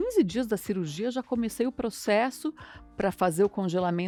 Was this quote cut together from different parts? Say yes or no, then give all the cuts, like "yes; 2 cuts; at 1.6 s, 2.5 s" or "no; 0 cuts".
no; 0 cuts